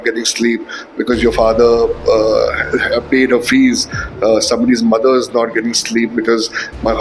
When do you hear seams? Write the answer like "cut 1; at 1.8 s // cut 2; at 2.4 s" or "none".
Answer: none